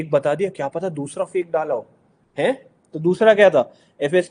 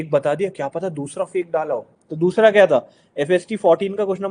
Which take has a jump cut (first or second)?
second